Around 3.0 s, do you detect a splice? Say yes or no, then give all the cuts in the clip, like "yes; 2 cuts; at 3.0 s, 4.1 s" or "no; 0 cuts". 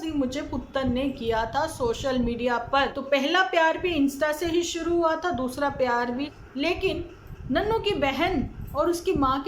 yes; 2 cuts; at 3.0 s, 6.3 s